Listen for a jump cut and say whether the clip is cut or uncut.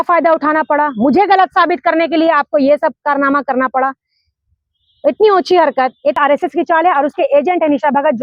cut